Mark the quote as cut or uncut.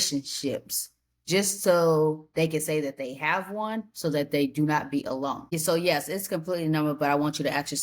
cut